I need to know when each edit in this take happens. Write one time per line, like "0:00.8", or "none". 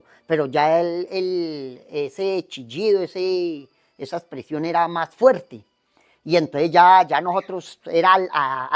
none